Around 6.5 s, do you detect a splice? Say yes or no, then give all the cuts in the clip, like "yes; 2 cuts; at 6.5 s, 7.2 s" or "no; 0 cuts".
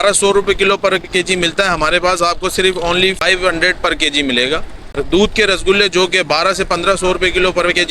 no; 2 cuts; at 3.2 s, 4.8 s